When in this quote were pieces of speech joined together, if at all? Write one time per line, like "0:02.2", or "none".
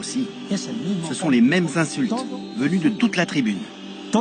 none